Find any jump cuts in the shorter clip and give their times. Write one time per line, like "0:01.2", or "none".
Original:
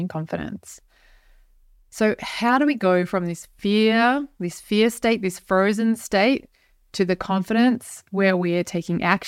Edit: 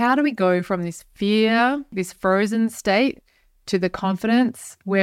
0:01.9